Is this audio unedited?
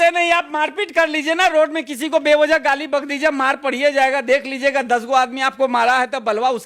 yes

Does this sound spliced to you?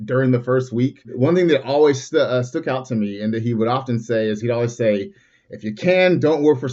yes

